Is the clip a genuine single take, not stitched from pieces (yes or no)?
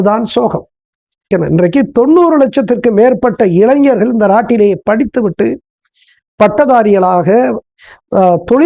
no